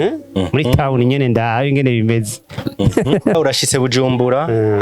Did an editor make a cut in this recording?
yes; 1 cut; at 3.3 s

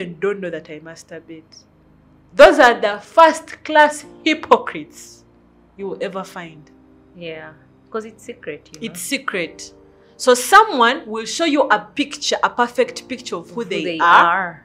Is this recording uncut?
yes; 0 cuts

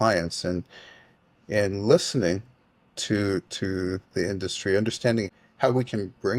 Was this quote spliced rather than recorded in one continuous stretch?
yes; 1 cut; at 5.3 s

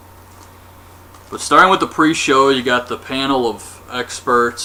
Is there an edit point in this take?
no; 0 cuts

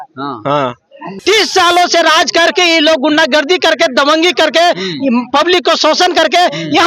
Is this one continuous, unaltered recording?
no; 1 cut; at 1.1 s

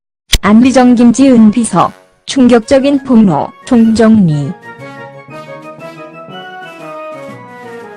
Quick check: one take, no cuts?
yes; 0 cuts

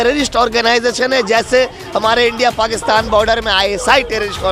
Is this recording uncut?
yes; 0 cuts

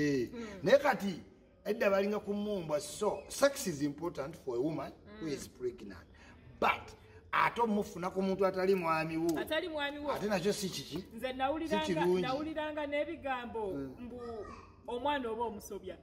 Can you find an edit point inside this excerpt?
no; 0 cuts

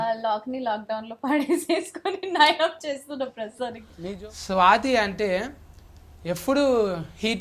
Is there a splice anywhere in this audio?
yes; 1 cut; at 3.9 s

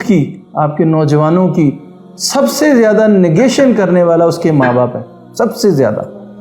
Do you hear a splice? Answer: no; 0 cuts

